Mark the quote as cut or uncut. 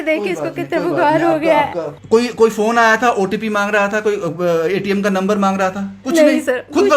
cut